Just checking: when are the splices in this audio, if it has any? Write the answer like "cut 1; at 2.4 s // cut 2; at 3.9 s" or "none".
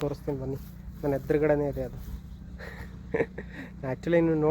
cut 1; at 3.6 s